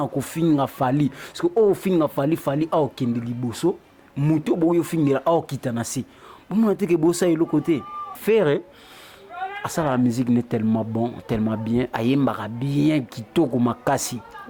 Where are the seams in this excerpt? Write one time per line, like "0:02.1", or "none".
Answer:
0:08.2